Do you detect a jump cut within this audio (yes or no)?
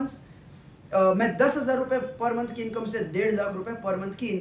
no